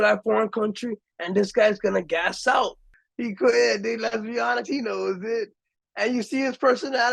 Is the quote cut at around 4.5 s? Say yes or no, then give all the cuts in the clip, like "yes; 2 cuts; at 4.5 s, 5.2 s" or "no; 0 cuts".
no; 2 cuts; at 3.0 s, 5.8 s